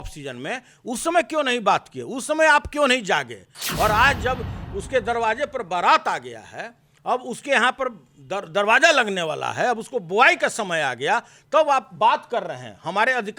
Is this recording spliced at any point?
no; 0 cuts

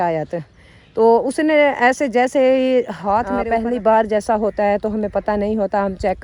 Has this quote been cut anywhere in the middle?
yes; 1 cut; at 3.4 s

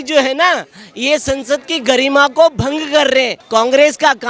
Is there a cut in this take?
yes; 1 cut; at 3.4 s

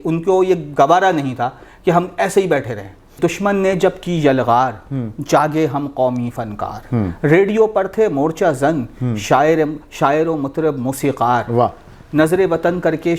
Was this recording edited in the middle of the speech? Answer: yes; 1 cut; at 3.2 s

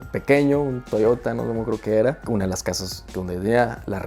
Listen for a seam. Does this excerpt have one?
no; 0 cuts

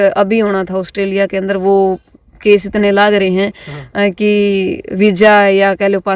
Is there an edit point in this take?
no; 0 cuts

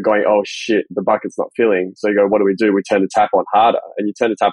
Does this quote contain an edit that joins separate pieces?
yes; 1 cut; at 0.9 s

